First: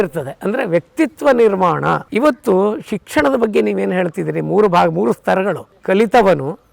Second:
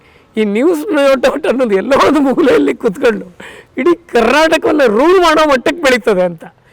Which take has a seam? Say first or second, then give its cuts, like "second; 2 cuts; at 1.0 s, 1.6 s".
first; 2 cuts; at 2.0 s, 5.7 s